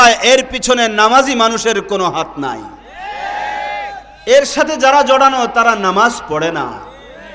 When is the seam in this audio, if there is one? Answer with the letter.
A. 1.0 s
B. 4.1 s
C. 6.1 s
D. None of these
D